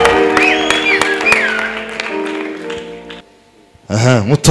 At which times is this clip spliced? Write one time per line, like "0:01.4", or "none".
0:03.2